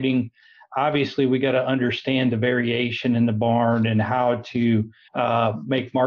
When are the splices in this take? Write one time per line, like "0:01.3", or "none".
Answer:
0:05.0

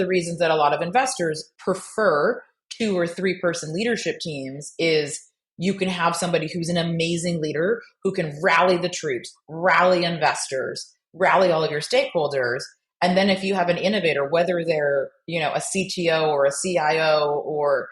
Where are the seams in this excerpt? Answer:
0:01.5

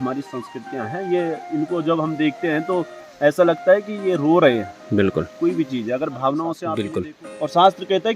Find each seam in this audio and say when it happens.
0:06.7

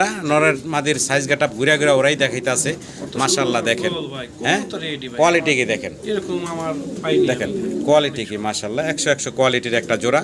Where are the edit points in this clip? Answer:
none

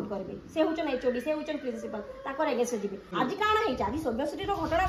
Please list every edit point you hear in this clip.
0:03.0

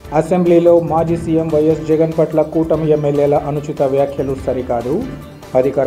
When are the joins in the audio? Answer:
none

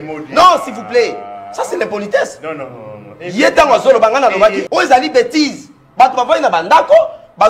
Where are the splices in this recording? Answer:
0:04.6

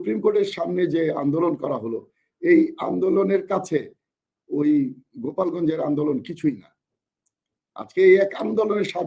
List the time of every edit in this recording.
none

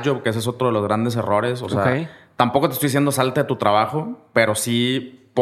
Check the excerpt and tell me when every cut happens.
none

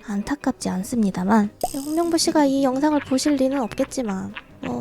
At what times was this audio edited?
0:01.6

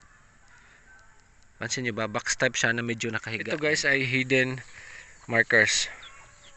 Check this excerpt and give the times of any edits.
0:03.3

